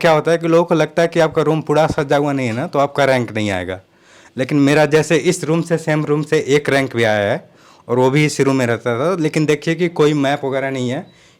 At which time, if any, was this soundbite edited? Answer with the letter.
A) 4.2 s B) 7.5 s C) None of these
C